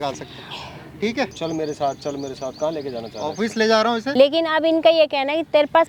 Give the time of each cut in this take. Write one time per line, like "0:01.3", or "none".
0:01.3
0:04.1